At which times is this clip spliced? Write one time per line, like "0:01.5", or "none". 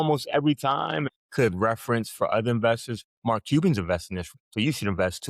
0:01.1
0:04.3